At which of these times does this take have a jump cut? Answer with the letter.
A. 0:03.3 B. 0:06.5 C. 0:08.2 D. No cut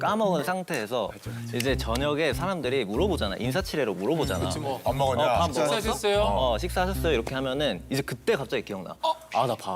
D